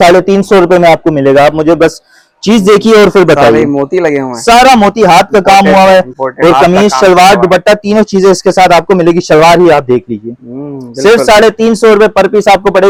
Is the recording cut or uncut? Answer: uncut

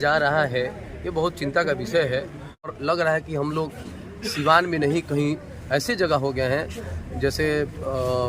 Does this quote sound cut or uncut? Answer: cut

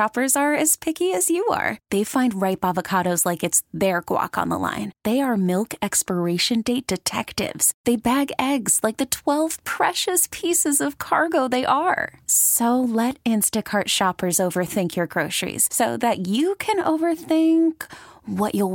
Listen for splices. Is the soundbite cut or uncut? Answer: uncut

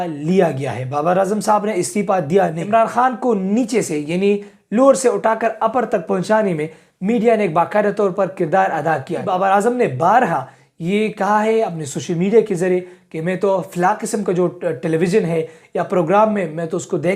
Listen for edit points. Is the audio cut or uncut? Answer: cut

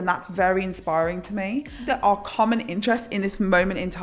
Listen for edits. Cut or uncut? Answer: cut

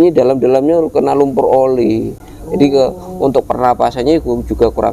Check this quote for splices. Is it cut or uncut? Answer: uncut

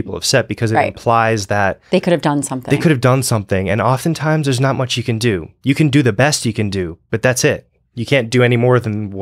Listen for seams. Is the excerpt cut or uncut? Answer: uncut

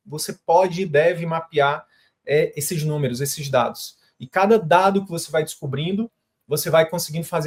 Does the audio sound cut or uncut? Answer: uncut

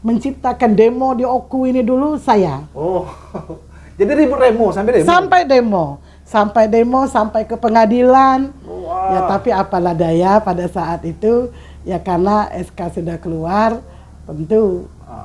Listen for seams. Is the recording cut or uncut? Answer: uncut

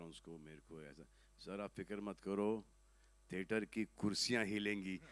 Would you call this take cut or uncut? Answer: uncut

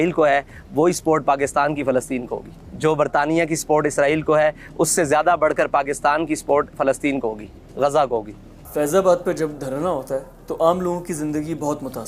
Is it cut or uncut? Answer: uncut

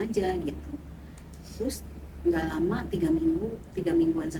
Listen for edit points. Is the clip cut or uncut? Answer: uncut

